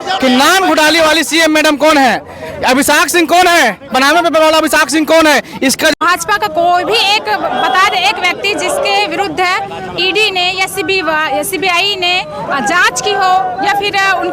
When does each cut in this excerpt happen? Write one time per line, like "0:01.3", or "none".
0:05.9